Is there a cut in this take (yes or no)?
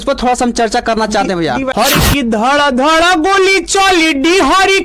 yes